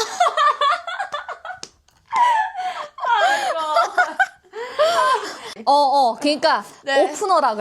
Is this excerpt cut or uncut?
cut